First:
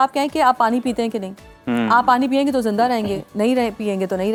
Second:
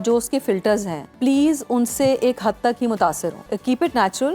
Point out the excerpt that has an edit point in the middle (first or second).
second